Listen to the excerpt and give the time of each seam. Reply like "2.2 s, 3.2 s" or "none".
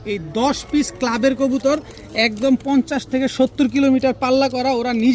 none